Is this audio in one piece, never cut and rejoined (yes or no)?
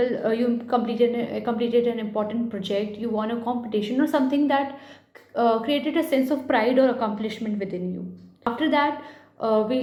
yes